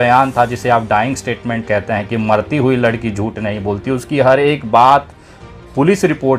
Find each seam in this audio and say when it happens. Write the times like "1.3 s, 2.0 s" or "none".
none